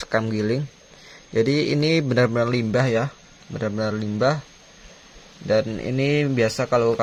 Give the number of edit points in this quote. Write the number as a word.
zero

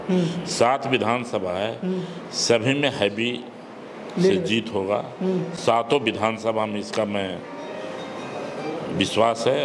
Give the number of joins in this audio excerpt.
zero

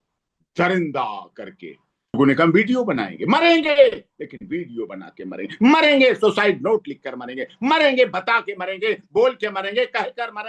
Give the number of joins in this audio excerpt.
one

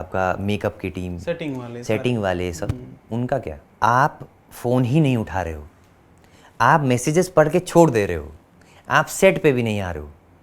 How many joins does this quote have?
one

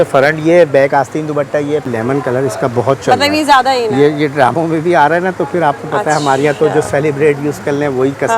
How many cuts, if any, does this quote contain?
one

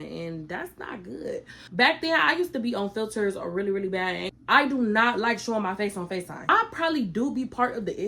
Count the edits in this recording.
three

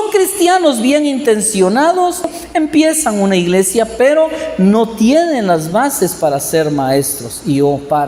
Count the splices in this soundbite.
one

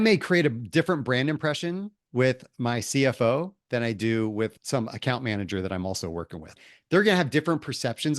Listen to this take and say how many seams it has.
two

